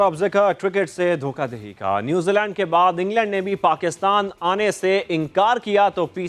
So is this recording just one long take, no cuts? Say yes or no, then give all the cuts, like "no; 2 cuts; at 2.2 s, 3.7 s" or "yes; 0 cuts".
yes; 0 cuts